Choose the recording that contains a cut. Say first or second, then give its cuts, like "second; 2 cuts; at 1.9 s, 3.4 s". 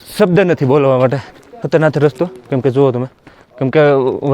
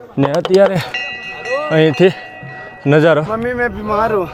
first; 1 cut; at 1.6 s